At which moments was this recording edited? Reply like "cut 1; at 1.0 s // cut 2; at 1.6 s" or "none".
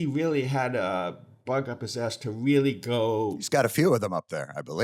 cut 1; at 3.4 s

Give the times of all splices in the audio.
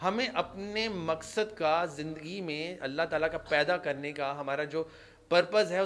none

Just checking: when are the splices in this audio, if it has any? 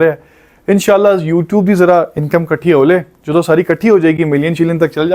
none

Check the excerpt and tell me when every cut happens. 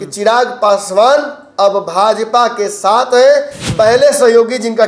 cut 1; at 3.6 s

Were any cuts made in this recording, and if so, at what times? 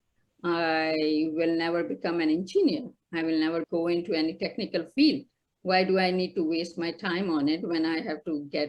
cut 1; at 3.7 s

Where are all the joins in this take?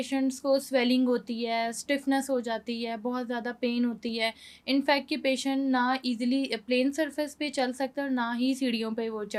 none

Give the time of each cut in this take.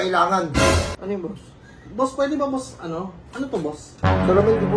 cut 1; at 0.9 s

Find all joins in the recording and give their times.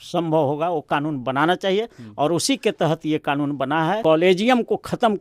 cut 1; at 4.0 s

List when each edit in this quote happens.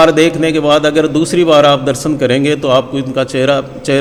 none

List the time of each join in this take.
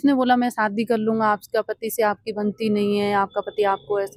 none

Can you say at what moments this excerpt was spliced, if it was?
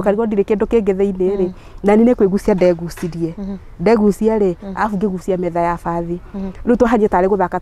none

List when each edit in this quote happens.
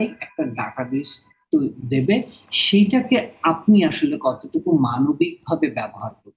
none

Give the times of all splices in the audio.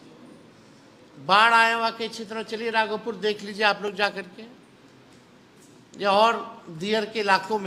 none

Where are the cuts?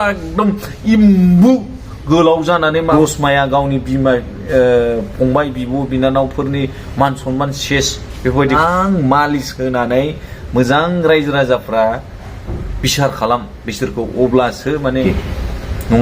cut 1; at 2.9 s // cut 2; at 8.6 s // cut 3; at 15.0 s

